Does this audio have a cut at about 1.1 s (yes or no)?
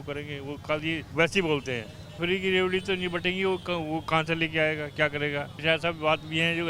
yes